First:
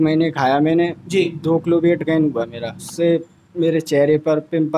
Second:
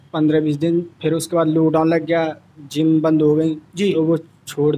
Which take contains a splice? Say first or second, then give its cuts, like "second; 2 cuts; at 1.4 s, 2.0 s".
first; 1 cut; at 2.8 s